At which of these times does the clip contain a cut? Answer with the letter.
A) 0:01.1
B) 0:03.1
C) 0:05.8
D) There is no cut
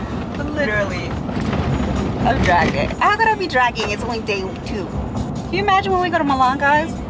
D